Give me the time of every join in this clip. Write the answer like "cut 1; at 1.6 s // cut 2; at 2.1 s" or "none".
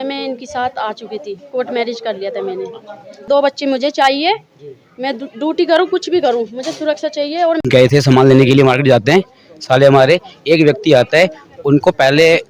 cut 1; at 3.3 s // cut 2; at 7.6 s